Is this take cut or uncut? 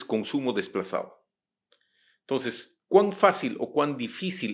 uncut